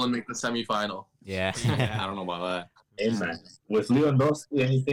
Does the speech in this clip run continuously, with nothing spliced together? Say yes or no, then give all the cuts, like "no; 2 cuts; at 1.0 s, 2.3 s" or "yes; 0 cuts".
yes; 0 cuts